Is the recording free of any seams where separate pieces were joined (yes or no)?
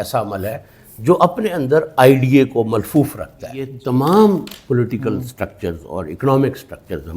no